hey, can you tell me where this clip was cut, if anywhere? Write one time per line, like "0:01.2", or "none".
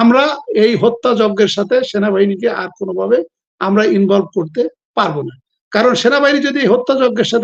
none